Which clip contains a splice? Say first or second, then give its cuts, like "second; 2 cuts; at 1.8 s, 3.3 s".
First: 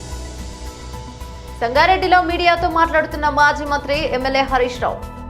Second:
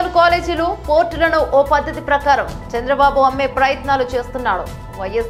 first; 1 cut; at 1.1 s